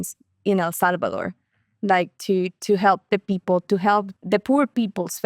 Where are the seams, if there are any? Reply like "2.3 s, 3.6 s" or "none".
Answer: 4.1 s